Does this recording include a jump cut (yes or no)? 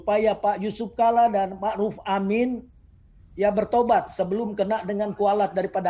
no